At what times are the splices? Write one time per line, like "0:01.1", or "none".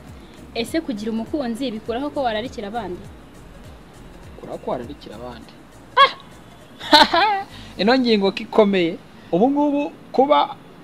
0:09.1